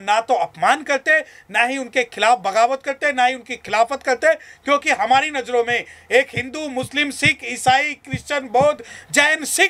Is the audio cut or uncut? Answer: uncut